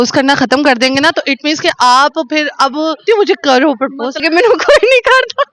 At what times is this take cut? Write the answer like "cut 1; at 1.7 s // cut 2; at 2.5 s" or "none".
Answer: cut 1; at 3.0 s // cut 2; at 4.2 s